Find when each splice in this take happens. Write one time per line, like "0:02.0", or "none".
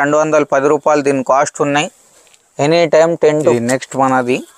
0:03.5